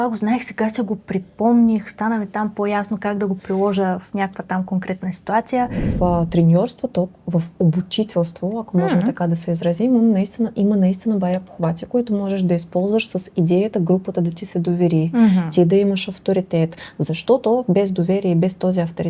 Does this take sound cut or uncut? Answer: cut